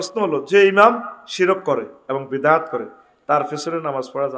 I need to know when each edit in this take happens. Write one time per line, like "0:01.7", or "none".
none